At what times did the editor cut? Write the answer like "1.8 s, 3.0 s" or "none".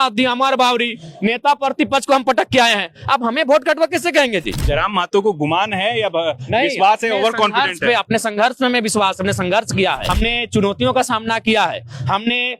4.6 s, 10.0 s